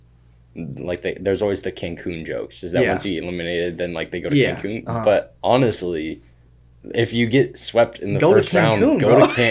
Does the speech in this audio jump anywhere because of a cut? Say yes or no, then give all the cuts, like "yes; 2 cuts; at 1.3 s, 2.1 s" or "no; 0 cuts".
no; 0 cuts